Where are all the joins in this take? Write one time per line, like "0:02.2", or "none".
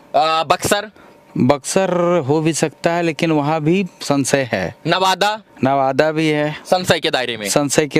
none